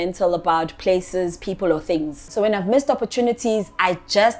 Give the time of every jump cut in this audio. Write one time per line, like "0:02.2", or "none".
0:02.2